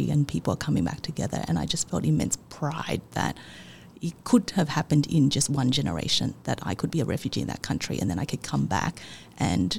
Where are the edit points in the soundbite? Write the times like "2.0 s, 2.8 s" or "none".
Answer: none